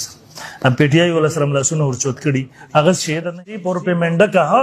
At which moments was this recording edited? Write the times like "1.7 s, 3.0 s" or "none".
3.3 s